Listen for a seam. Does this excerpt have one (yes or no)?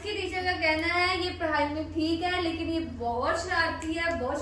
no